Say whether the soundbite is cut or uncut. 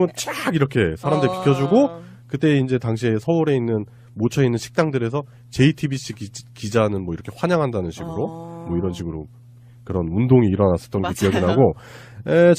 uncut